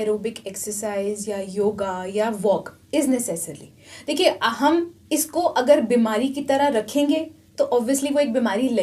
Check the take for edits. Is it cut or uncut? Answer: uncut